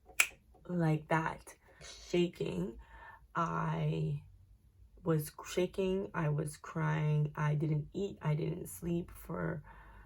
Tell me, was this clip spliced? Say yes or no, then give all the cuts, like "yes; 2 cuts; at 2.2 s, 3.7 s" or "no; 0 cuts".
no; 0 cuts